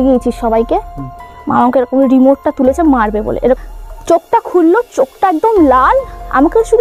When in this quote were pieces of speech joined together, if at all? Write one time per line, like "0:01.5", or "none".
0:03.6